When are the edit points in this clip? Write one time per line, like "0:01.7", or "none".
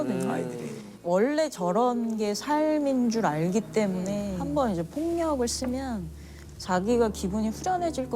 0:04.4